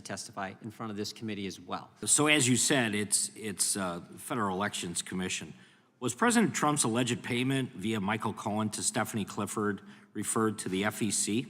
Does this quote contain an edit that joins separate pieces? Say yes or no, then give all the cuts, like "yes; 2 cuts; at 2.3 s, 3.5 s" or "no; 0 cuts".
yes; 1 cut; at 2.0 s